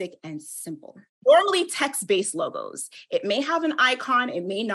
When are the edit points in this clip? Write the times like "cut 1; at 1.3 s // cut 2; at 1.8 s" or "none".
cut 1; at 1.2 s